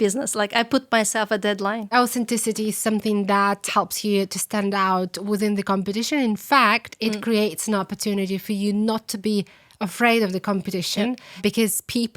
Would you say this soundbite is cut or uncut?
cut